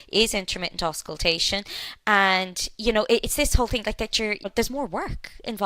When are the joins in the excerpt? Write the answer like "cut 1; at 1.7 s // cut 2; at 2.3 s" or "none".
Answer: cut 1; at 4.5 s